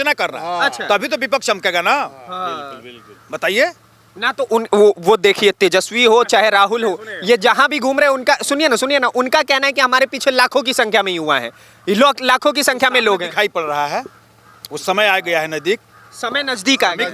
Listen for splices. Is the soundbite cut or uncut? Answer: uncut